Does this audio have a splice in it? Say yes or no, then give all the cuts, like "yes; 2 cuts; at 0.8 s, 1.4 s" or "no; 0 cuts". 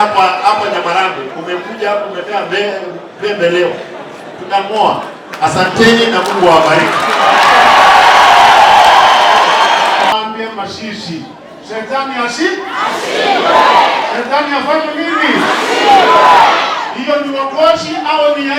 yes; 1 cut; at 10.1 s